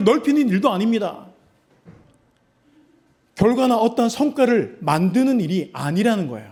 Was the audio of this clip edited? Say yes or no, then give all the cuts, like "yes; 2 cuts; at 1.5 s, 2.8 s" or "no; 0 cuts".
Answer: no; 0 cuts